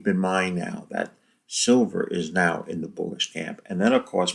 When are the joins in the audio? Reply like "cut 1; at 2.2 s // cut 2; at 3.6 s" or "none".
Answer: none